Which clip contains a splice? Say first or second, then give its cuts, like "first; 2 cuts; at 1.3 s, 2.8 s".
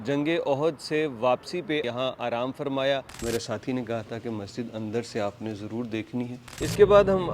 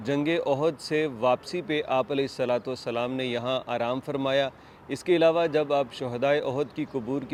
first; 3 cuts; at 1.8 s, 3.1 s, 6.6 s